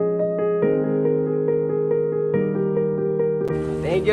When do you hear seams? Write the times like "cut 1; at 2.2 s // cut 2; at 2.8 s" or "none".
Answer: cut 1; at 1.4 s // cut 2; at 3.4 s